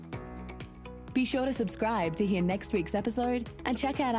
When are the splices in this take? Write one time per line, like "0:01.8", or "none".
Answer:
0:01.0